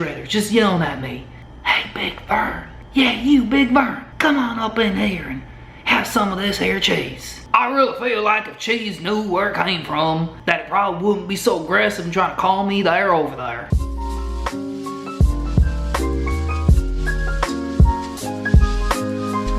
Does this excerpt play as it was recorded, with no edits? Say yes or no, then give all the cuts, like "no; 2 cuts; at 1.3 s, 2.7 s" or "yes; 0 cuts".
no; 2 cuts; at 2.7 s, 7.4 s